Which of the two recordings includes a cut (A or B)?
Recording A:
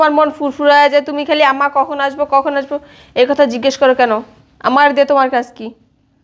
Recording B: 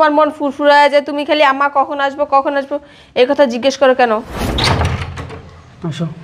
B